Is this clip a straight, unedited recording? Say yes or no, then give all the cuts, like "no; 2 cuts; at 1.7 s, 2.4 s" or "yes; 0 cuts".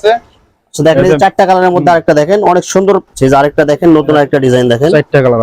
no; 1 cut; at 3.1 s